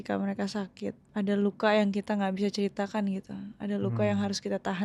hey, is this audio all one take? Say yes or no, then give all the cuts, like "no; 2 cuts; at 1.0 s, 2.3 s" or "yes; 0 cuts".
no; 1 cut; at 1.0 s